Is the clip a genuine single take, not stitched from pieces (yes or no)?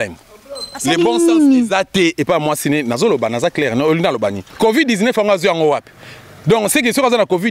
no